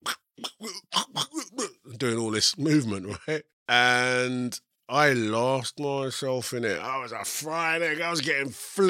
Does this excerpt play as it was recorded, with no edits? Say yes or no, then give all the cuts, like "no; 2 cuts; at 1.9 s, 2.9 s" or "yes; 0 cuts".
no; 1 cut; at 3.5 s